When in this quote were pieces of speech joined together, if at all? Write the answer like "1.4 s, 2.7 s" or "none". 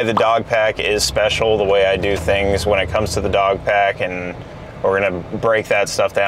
none

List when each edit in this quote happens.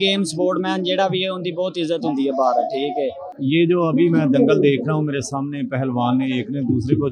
3.3 s

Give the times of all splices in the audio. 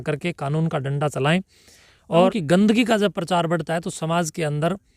2.3 s

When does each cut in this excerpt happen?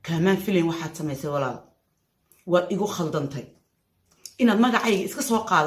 none

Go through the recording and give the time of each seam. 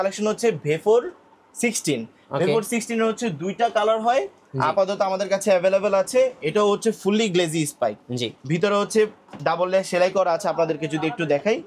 none

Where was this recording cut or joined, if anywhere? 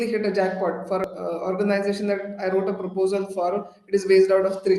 1.1 s

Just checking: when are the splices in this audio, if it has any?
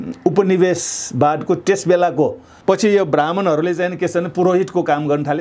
2.5 s

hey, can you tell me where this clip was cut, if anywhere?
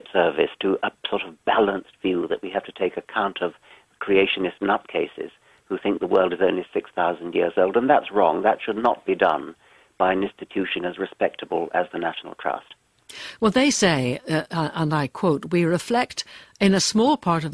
14.8 s

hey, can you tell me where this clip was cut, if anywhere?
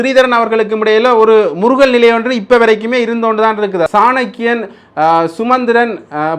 3.9 s

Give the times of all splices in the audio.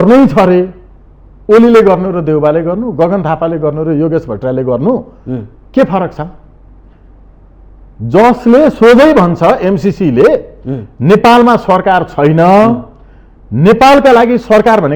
none

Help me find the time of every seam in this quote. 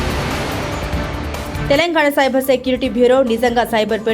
1.6 s

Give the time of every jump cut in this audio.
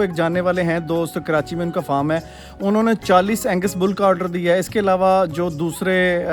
none

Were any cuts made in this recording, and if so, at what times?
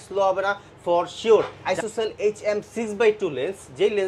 1.6 s

